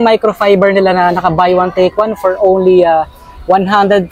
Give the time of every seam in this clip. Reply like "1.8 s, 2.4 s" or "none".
none